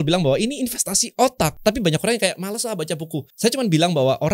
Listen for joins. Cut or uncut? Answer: cut